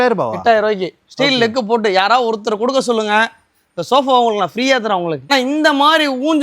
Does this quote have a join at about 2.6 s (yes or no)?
no